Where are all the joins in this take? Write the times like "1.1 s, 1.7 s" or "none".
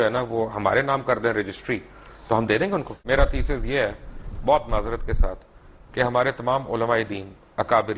3.0 s